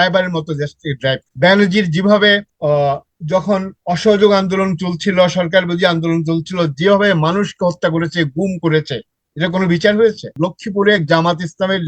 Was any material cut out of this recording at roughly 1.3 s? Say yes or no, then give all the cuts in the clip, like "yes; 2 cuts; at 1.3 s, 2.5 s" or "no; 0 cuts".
yes; 3 cuts; at 1.3 s, 2.5 s, 10.3 s